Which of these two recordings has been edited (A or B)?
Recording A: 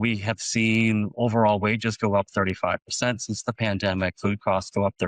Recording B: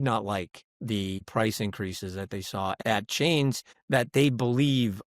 B